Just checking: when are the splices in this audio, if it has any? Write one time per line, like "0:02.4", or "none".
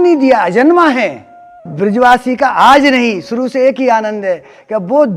0:01.7